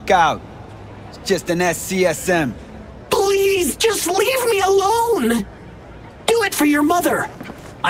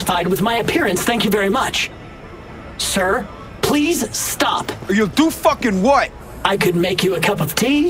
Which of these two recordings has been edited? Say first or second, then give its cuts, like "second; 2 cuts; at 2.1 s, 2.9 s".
second; 1 cut; at 4.7 s